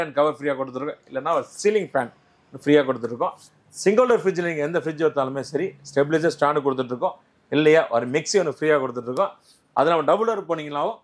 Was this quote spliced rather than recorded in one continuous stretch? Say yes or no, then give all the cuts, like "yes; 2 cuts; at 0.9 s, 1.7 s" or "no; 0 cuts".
no; 0 cuts